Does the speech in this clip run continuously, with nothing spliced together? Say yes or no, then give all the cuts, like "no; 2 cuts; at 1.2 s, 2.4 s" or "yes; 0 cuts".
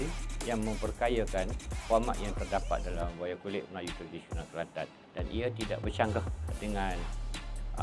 yes; 0 cuts